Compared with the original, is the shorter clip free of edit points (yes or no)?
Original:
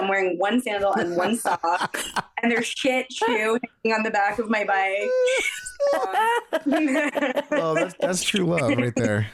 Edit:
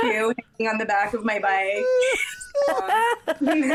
yes